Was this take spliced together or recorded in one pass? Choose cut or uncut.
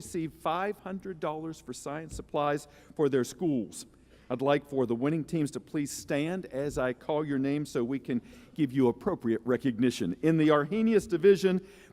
cut